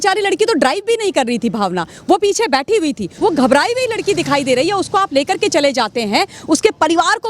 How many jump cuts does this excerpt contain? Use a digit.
1